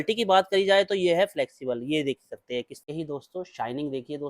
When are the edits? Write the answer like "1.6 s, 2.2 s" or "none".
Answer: 2.8 s

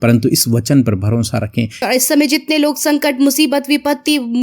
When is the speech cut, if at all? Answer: 1.8 s

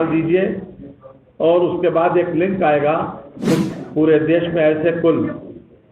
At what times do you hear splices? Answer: 3.6 s

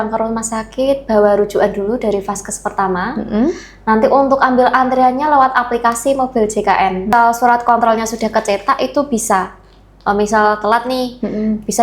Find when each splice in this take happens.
7.1 s

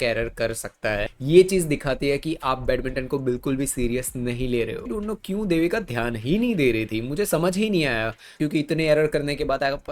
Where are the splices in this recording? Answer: 1.1 s, 4.8 s, 8.4 s

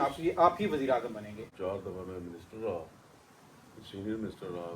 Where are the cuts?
1.4 s

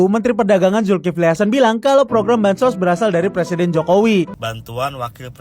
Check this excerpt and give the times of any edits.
4.4 s

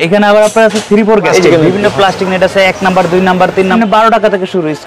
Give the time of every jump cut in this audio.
1.3 s, 3.7 s

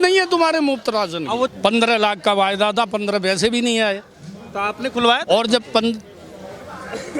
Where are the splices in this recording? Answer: 1.5 s

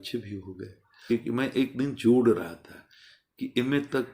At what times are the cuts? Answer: 1.1 s

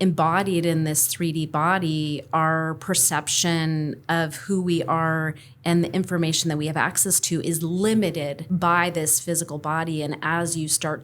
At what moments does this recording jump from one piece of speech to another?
8.4 s

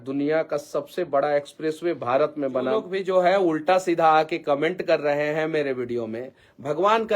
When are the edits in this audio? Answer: 2.9 s

